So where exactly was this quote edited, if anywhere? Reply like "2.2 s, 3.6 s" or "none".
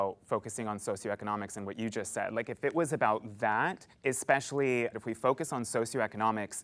3.9 s, 4.9 s

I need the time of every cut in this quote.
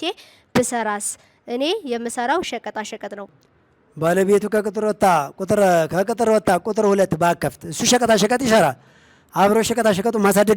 3.3 s

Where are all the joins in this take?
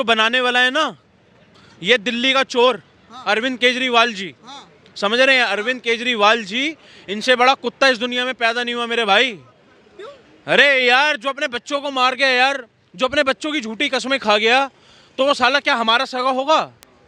none

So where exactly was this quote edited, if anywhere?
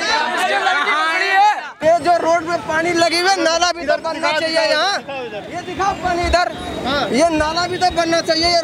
1.7 s

